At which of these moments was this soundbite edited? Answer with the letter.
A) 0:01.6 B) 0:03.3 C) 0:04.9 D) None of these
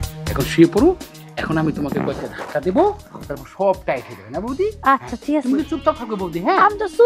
D